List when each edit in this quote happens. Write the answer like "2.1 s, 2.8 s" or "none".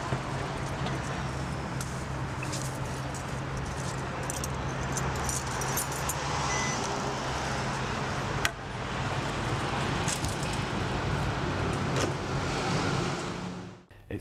none

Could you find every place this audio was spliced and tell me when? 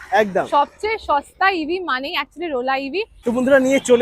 3.1 s

